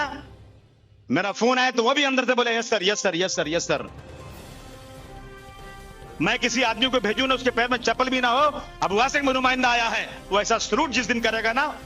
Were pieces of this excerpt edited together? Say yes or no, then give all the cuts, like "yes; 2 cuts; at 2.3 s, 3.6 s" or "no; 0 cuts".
no; 0 cuts